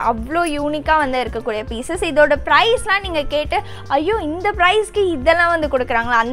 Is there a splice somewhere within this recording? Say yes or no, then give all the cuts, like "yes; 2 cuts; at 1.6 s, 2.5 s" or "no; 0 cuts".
no; 0 cuts